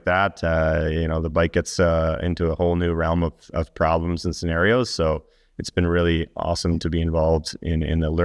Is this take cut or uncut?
uncut